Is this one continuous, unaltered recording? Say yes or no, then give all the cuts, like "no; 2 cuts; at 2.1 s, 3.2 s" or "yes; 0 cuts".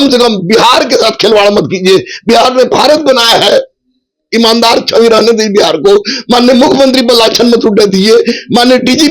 yes; 0 cuts